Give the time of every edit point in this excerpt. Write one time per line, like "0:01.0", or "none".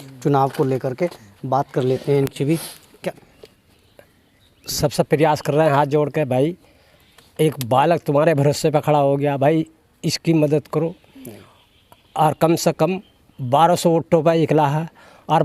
0:02.8